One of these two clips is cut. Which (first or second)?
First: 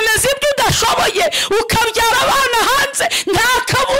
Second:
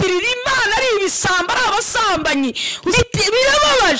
second